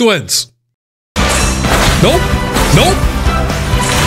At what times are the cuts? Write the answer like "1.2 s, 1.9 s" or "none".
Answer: 1.1 s